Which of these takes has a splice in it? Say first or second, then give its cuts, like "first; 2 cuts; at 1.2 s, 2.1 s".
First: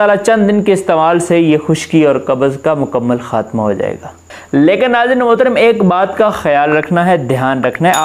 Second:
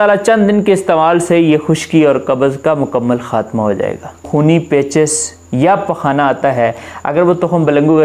second; 1 cut; at 4.2 s